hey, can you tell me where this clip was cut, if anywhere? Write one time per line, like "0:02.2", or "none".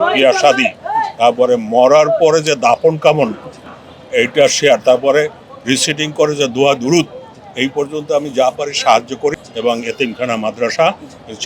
0:09.4